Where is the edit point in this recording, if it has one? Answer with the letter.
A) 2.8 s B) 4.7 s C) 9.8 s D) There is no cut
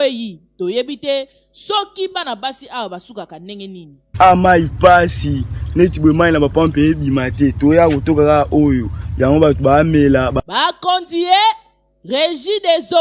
D